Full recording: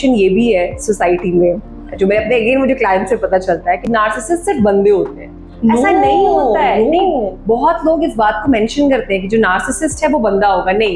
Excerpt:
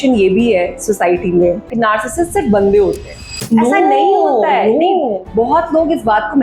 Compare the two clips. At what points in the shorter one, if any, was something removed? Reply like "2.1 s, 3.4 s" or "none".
1.7 s